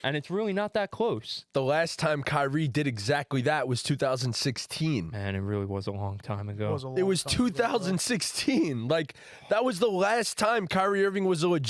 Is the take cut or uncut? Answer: cut